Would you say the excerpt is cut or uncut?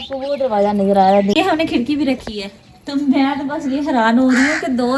cut